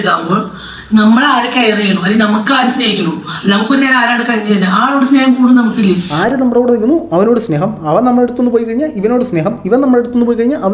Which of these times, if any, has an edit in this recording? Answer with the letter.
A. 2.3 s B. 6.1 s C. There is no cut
B